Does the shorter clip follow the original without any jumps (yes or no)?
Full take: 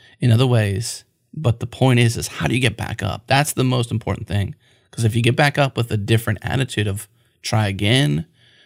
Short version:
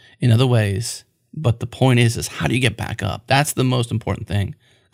yes